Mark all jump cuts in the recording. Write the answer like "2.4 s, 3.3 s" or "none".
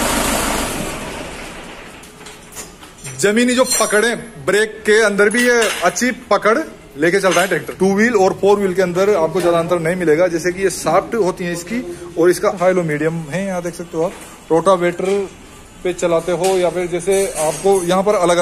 7.6 s, 12.6 s